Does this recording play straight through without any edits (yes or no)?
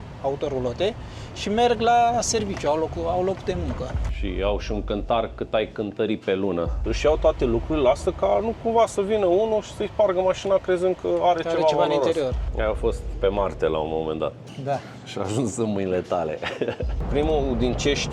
no